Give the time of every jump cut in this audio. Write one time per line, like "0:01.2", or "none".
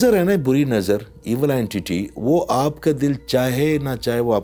none